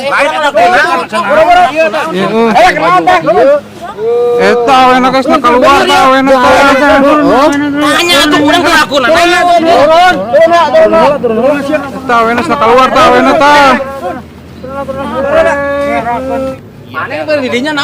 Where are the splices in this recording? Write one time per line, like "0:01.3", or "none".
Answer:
0:16.5